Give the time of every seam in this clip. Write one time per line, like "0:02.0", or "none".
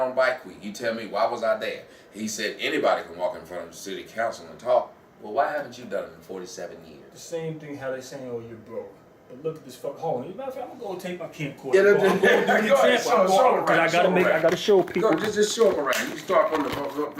0:05.8